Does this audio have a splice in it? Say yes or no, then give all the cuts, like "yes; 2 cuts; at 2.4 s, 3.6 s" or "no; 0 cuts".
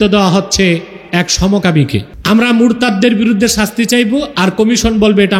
yes; 1 cut; at 2.1 s